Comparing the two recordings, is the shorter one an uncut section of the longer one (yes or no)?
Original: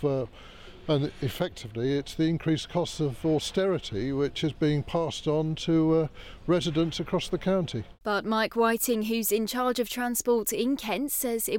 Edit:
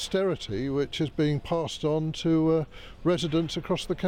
yes